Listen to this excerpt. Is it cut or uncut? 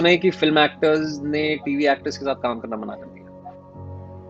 uncut